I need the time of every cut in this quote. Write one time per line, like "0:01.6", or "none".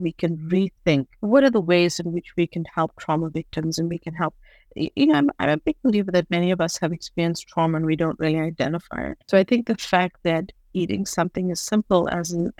0:01.1
0:09.4